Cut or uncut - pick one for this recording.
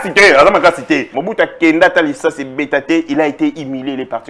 cut